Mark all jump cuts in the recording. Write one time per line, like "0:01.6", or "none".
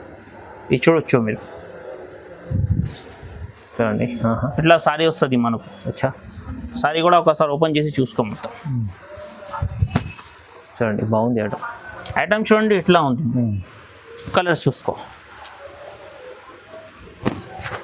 none